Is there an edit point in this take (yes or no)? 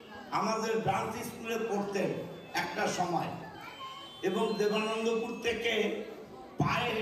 no